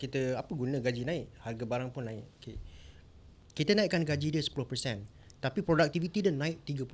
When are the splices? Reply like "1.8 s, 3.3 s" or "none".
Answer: 3.4 s